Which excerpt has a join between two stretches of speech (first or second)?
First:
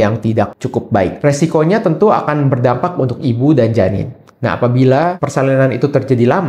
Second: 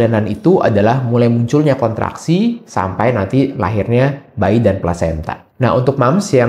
first